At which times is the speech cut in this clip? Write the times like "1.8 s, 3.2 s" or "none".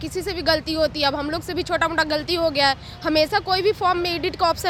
none